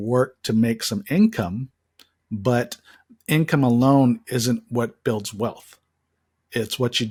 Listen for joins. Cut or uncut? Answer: uncut